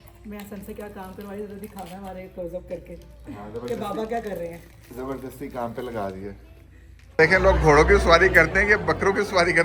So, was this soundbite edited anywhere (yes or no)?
yes